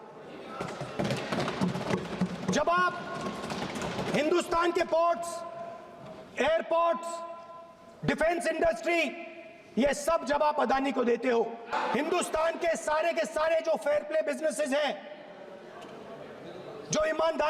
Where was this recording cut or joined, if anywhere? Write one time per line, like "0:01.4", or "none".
0:11.7